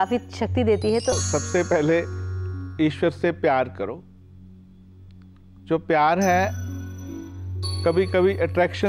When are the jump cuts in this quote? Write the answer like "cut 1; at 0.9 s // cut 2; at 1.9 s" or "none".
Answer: cut 1; at 1.2 s